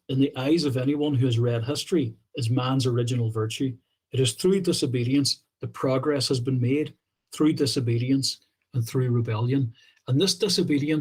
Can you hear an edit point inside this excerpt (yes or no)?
no